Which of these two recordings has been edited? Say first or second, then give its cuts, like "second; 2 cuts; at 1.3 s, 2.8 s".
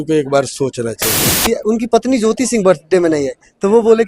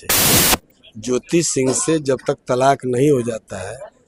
first; 1 cut; at 1.5 s